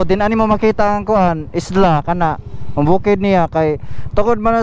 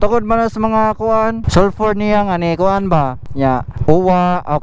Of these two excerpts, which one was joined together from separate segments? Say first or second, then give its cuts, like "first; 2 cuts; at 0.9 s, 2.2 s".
second; 2 cuts; at 1.4 s, 3.3 s